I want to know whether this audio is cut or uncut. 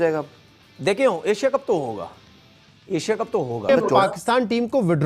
cut